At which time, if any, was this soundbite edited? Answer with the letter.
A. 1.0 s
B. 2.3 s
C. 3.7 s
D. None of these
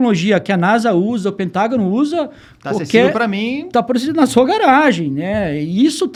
D